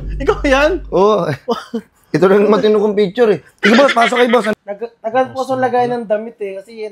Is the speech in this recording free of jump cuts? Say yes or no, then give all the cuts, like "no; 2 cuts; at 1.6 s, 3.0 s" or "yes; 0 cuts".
no; 1 cut; at 4.5 s